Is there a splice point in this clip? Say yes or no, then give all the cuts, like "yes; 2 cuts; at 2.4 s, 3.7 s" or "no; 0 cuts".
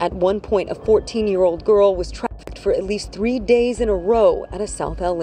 no; 0 cuts